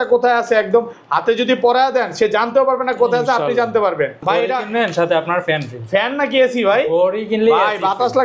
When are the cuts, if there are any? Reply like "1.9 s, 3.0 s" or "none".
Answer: 4.2 s